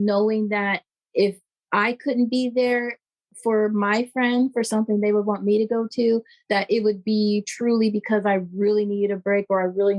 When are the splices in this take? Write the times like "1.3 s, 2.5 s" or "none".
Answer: none